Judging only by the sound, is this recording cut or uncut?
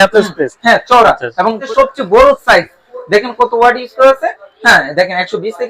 cut